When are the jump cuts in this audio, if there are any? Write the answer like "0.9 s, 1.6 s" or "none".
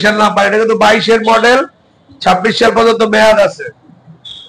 none